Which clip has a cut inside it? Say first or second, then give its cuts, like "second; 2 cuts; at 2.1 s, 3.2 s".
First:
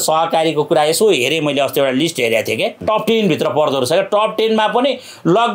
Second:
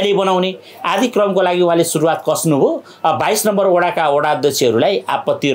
first; 1 cut; at 2.8 s